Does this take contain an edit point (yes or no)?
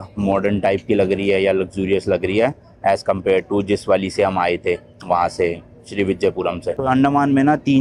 no